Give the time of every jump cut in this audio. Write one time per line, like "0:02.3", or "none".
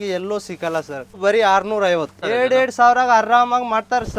0:01.2
0:02.2